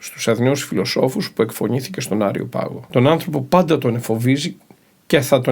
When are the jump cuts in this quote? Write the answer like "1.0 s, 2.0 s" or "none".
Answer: 2.8 s